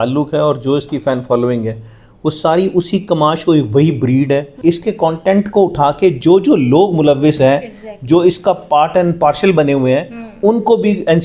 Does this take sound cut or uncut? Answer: cut